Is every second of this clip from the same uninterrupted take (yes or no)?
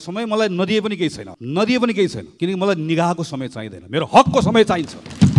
no